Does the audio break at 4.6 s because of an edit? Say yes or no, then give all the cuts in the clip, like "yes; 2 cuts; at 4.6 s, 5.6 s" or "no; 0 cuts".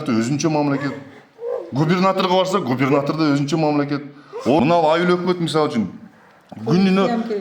yes; 1 cut; at 4.6 s